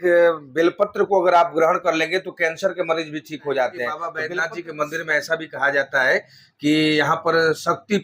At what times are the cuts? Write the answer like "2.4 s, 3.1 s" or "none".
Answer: 4.1 s